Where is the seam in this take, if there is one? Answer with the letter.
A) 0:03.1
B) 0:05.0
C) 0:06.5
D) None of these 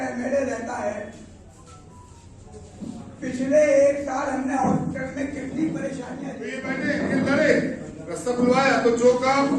C